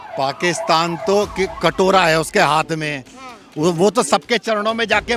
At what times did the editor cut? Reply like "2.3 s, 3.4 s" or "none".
none